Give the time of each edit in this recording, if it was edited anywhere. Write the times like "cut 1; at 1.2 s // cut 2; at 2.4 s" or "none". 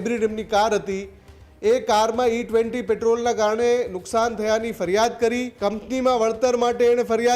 cut 1; at 5.5 s

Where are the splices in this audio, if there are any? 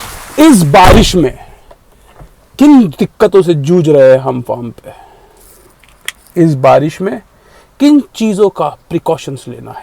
none

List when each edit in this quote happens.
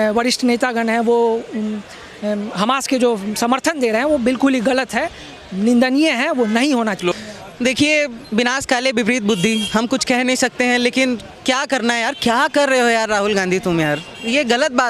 cut 1; at 7.0 s

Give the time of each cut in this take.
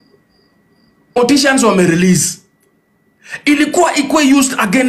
cut 1; at 1.1 s

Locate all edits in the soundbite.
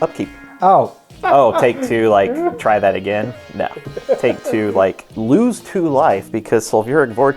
cut 1; at 1.2 s // cut 2; at 5.1 s

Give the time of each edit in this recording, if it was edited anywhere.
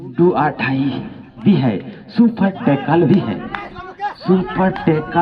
none

